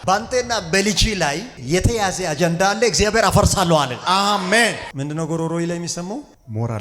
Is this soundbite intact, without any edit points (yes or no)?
no